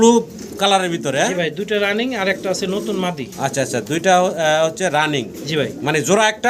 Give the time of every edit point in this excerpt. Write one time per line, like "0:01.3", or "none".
none